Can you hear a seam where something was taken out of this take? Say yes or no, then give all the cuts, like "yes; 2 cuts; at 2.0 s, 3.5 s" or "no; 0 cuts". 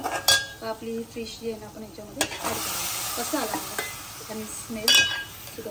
no; 0 cuts